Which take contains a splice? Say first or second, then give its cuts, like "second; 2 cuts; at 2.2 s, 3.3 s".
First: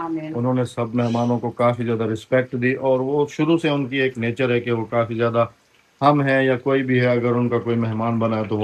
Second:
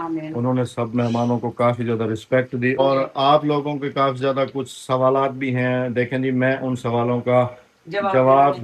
second; 1 cut; at 2.8 s